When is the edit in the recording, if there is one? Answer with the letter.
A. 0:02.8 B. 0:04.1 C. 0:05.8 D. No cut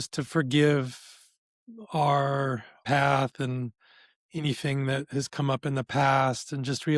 A